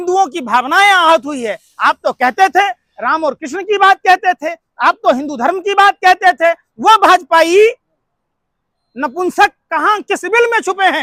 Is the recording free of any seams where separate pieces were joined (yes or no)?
yes